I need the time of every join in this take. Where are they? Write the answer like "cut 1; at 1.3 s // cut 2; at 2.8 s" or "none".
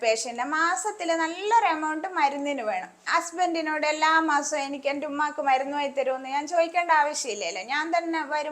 cut 1; at 2.9 s